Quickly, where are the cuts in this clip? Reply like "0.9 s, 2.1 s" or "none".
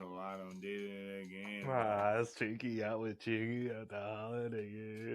1.6 s